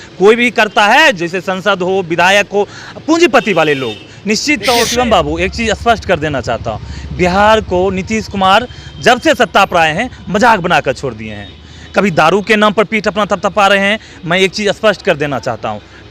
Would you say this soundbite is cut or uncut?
cut